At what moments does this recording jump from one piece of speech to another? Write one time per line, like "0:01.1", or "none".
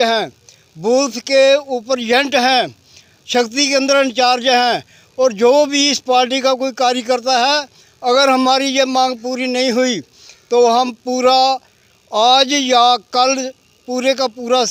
none